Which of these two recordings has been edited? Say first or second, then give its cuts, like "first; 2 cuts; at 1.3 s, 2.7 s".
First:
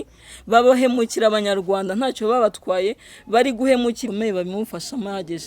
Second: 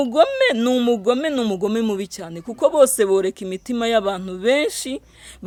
first; 1 cut; at 4.0 s